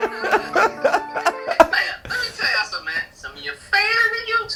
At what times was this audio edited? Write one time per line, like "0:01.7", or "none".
none